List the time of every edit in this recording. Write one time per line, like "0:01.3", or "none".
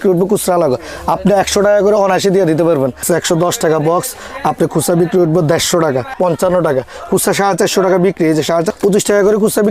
0:03.0
0:06.1
0:08.7